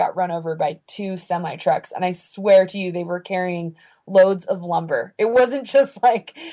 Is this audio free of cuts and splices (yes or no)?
yes